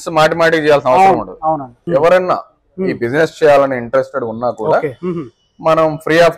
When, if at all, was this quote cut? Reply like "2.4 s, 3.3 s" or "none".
1.8 s